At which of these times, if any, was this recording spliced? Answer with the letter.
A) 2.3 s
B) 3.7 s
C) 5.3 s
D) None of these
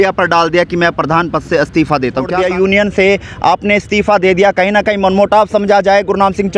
A